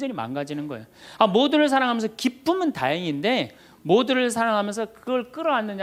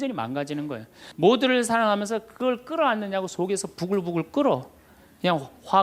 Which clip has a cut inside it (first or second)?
second